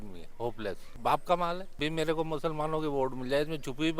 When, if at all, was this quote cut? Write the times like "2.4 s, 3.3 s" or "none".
0.9 s, 1.7 s